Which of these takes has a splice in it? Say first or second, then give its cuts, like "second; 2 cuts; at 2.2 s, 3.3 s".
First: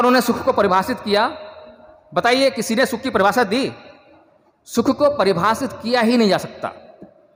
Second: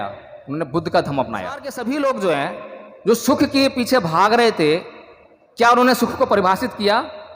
second; 1 cut; at 1.7 s